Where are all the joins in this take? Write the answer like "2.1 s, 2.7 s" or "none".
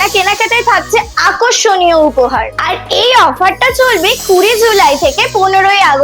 none